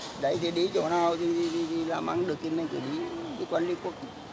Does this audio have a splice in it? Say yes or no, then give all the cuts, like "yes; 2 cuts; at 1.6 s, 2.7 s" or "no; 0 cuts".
no; 0 cuts